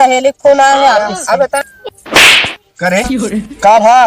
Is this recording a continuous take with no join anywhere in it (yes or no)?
no